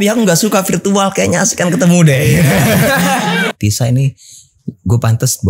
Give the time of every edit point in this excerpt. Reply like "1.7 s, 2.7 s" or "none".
3.5 s